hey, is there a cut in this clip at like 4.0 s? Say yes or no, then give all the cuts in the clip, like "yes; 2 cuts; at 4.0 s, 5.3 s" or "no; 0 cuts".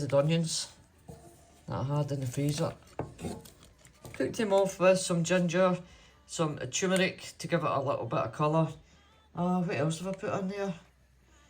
yes; 1 cut; at 4.0 s